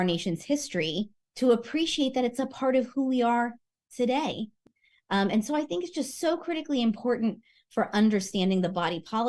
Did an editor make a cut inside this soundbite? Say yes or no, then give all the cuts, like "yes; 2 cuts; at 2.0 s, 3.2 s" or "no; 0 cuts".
yes; 1 cut; at 4.7 s